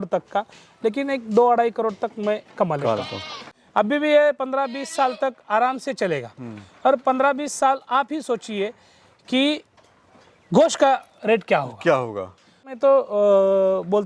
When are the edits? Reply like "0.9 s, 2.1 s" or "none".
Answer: 3.5 s, 12.7 s